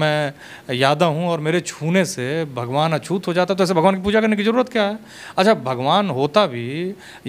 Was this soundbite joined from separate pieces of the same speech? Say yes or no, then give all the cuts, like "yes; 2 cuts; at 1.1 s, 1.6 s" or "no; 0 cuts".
no; 0 cuts